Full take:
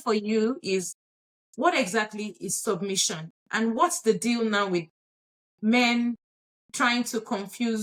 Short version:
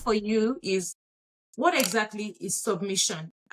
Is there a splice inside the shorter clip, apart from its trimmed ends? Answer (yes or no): no